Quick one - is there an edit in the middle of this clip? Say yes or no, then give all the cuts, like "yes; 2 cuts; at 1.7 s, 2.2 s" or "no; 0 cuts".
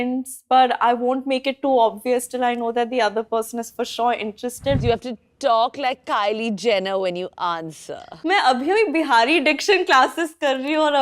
yes; 2 cuts; at 4.8 s, 8.1 s